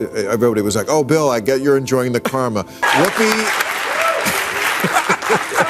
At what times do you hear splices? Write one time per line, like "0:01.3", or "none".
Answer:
0:02.8